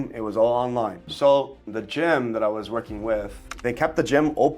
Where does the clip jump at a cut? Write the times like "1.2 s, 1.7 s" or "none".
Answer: 1.0 s, 1.7 s, 3.5 s